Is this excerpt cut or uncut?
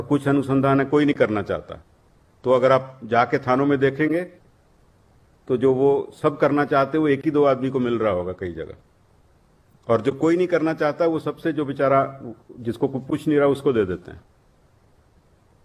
uncut